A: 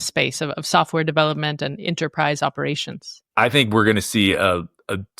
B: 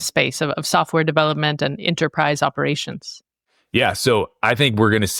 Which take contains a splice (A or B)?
A